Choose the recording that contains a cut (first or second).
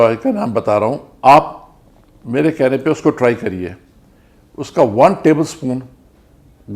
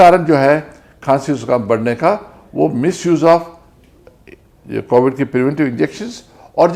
first